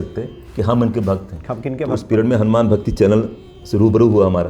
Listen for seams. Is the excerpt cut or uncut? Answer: cut